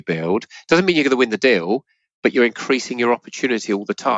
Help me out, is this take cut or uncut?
uncut